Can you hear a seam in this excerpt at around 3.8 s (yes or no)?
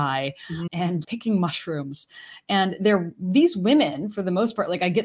no